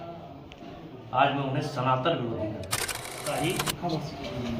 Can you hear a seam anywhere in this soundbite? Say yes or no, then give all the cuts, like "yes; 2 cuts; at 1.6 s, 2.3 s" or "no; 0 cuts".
yes; 1 cut; at 3.2 s